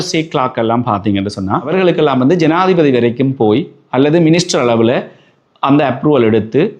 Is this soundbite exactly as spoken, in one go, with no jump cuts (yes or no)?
no